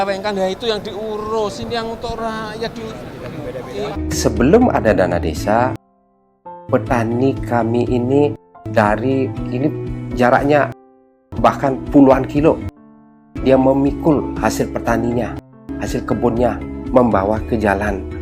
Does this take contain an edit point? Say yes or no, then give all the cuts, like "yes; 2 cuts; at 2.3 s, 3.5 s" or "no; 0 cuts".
yes; 1 cut; at 3.9 s